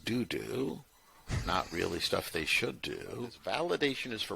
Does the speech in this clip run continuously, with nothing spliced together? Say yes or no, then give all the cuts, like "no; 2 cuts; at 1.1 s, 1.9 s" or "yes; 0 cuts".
no; 1 cut; at 3.3 s